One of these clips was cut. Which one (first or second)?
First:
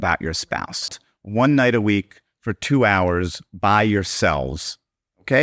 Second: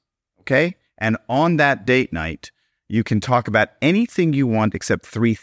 first